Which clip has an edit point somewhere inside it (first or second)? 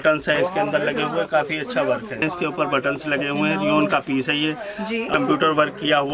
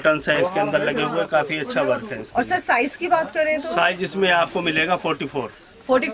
first